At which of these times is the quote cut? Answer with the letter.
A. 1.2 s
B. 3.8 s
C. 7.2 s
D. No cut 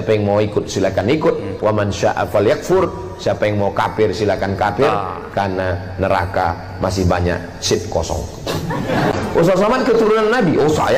D